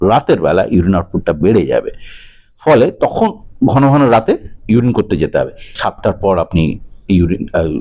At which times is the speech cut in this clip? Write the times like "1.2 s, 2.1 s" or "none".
5.7 s